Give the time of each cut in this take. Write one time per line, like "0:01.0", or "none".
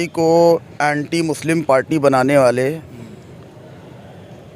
none